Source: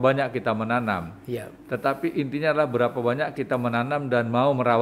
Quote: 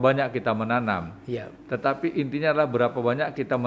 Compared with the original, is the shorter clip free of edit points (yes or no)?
yes